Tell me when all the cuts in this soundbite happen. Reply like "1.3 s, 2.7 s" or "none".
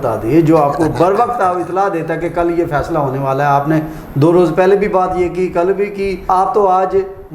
6.2 s